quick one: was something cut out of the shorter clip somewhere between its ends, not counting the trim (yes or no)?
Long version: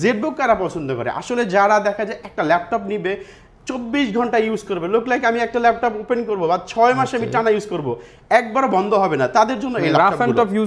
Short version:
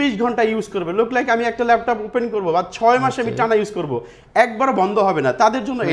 no